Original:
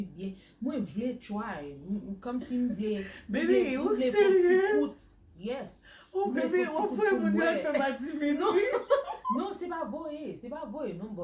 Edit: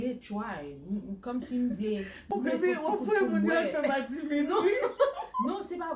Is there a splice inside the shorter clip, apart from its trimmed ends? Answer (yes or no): yes